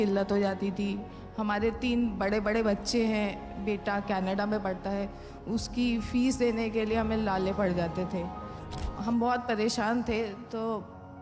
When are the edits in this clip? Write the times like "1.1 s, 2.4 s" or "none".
8.9 s